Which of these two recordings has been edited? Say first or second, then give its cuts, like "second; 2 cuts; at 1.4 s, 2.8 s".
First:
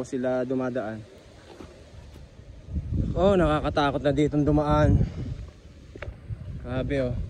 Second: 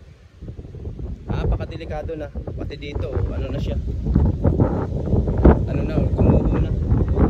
first; 1 cut; at 2.3 s